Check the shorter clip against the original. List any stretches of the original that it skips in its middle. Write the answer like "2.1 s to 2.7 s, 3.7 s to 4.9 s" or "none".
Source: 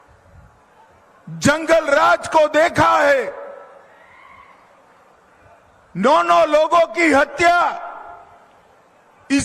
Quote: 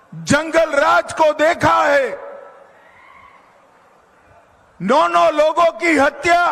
none